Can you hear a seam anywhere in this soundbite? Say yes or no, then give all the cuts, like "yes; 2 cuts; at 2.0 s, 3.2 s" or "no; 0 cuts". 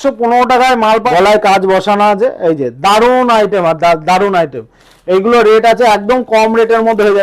yes; 1 cut; at 1.1 s